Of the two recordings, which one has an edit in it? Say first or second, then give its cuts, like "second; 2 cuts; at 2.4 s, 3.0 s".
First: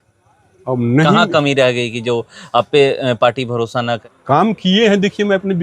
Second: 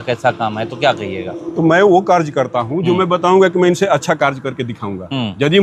first; 1 cut; at 4.0 s